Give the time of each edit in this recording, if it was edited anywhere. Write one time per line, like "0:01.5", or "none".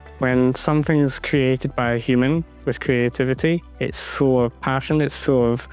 none